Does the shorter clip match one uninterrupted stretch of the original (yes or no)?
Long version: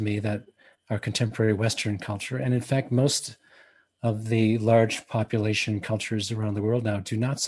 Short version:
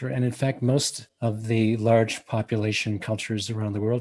no